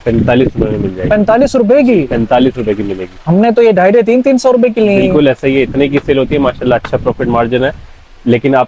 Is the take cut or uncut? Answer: uncut